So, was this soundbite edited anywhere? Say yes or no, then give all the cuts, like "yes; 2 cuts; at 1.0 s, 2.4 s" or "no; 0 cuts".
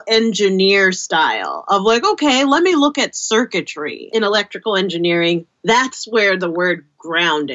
yes; 1 cut; at 4.1 s